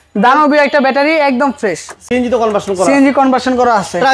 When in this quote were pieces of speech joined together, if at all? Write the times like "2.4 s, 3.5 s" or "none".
none